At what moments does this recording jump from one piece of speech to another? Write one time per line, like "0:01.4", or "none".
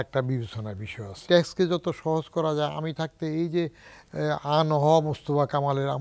0:01.2